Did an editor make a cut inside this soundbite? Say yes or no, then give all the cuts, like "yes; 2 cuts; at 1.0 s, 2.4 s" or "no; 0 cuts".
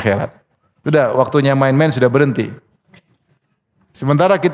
no; 0 cuts